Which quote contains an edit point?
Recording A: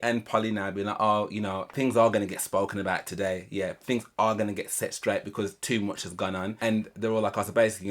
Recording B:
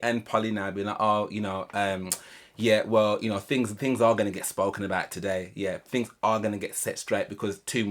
A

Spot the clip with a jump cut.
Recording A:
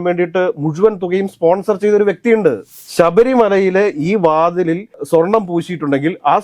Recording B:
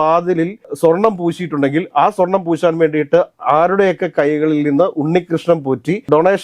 A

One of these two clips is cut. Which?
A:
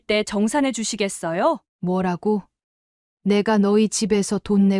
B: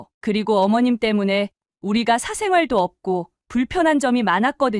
A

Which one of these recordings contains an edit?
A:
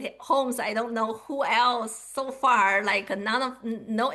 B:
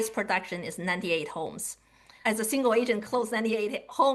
B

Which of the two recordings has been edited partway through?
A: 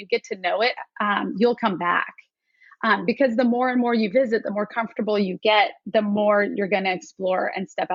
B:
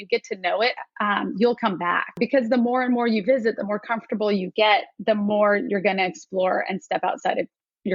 B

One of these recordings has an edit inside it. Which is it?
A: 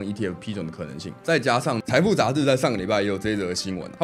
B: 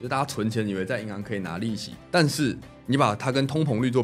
A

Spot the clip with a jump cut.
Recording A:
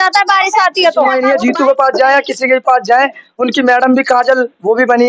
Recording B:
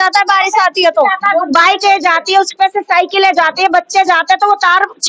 A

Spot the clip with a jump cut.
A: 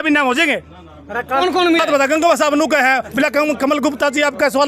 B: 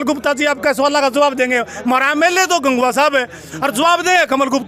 A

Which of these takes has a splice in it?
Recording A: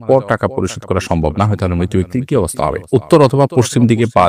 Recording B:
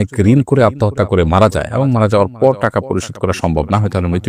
A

